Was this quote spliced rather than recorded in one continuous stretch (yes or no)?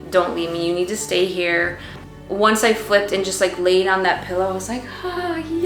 yes